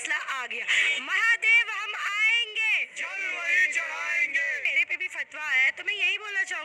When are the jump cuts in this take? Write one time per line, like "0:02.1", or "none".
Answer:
0:04.6